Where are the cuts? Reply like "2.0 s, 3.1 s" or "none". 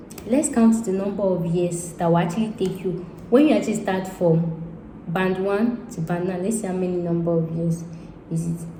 none